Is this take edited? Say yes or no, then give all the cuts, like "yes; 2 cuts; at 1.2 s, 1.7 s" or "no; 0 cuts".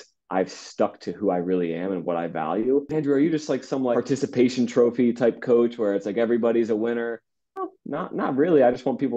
yes; 3 cuts; at 2.9 s, 3.9 s, 7.7 s